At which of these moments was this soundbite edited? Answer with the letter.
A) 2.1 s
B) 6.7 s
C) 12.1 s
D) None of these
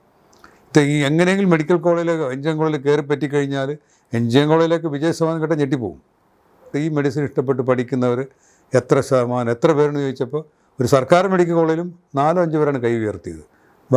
B